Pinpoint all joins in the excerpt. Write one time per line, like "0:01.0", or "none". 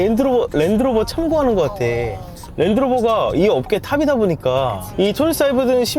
0:04.9